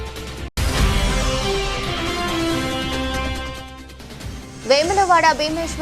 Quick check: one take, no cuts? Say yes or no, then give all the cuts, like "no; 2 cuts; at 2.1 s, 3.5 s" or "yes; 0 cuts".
no; 2 cuts; at 3.1 s, 4.4 s